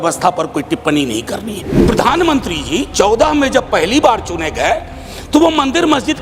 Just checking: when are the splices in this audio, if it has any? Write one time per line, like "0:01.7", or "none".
0:01.7